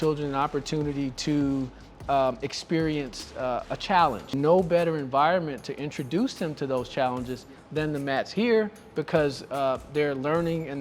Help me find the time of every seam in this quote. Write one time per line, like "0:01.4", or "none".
0:04.3